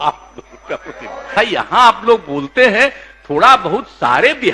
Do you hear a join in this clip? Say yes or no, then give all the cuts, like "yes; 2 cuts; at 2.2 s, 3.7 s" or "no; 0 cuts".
yes; 1 cut; at 1.3 s